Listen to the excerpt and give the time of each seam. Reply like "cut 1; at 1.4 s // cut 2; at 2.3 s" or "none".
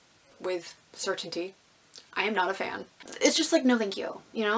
cut 1; at 3.0 s